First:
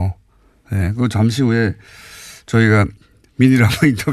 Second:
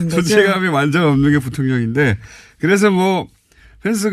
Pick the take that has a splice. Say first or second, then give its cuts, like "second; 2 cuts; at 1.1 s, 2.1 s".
second; 1 cut; at 2.9 s